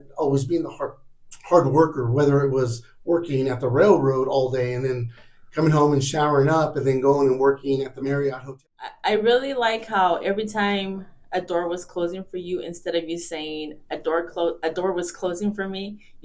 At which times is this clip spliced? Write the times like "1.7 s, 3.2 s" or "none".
8.5 s